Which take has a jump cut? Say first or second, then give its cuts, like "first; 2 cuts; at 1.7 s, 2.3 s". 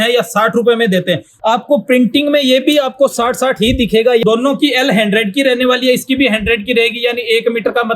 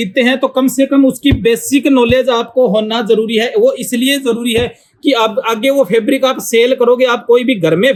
first; 2 cuts; at 1.3 s, 4.2 s